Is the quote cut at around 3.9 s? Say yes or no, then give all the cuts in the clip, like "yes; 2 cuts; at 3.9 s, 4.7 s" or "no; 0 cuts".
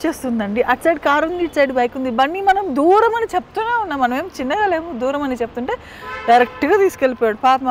no; 0 cuts